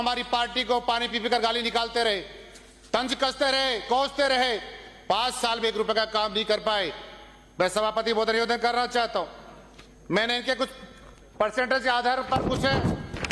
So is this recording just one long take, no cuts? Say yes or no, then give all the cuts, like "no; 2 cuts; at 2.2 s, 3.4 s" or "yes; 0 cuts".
yes; 0 cuts